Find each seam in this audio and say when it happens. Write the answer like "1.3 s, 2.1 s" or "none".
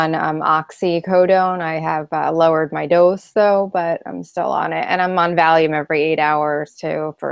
4.1 s